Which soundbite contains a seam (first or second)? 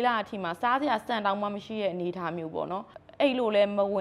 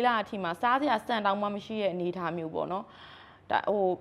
first